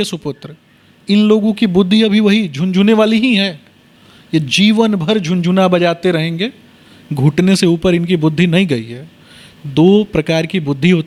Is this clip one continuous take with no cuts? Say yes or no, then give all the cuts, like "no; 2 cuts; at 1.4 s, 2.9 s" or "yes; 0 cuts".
yes; 0 cuts